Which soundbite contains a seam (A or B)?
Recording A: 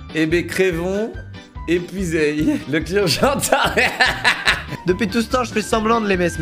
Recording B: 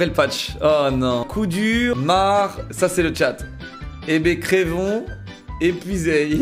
A